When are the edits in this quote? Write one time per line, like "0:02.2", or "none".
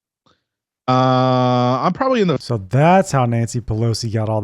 0:02.4